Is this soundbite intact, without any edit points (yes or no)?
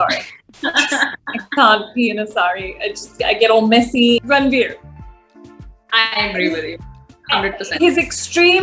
no